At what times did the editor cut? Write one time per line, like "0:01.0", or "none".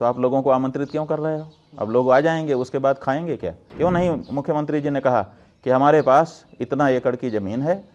0:03.6